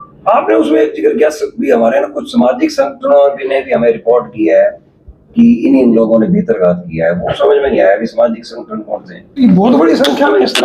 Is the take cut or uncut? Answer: cut